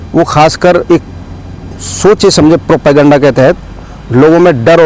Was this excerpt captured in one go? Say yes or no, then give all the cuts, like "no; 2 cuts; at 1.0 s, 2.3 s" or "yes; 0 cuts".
yes; 0 cuts